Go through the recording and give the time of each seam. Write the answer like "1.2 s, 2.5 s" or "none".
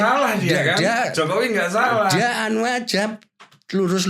none